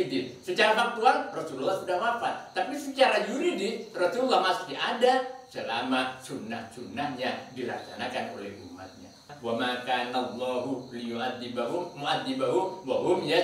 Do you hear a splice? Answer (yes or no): yes